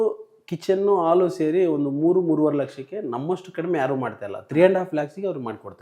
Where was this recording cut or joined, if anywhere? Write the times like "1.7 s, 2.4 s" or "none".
none